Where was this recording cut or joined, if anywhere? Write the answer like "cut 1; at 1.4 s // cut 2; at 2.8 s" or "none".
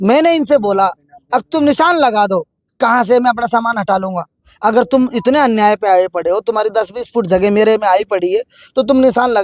cut 1; at 2.6 s